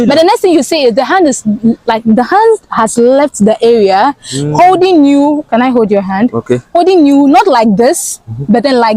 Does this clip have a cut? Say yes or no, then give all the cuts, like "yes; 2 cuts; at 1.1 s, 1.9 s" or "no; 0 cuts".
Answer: no; 0 cuts